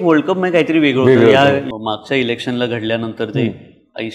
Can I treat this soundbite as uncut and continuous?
no; 1 cut; at 1.6 s

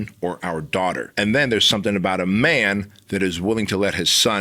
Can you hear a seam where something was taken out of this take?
yes; 1 cut; at 1.1 s

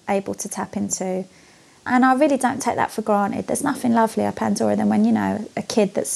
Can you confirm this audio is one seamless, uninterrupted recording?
no; 1 cut; at 1.9 s

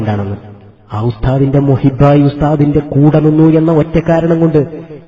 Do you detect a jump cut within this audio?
yes; 1 cut; at 2.5 s

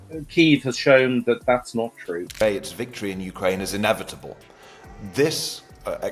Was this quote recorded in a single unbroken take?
no; 1 cut; at 2.3 s

